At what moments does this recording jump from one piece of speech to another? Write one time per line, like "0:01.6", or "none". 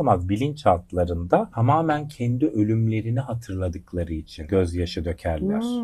0:01.5
0:04.4